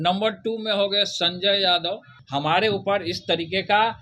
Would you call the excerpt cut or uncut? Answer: cut